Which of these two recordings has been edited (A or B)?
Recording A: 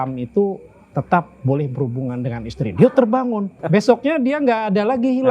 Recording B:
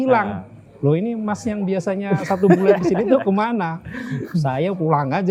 A